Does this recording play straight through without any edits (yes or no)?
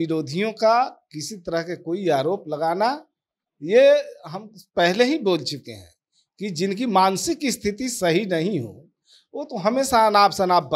yes